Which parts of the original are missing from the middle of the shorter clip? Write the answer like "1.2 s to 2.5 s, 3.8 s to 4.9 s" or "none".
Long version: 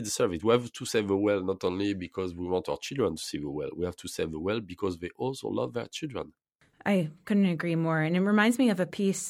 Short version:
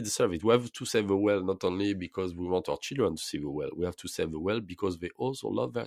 none